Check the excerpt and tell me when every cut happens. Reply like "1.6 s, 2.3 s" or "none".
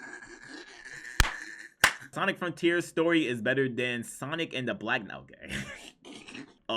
2.2 s